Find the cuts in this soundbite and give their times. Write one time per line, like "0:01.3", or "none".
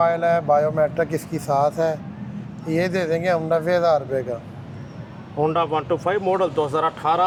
none